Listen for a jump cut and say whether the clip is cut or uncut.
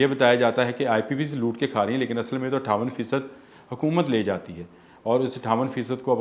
uncut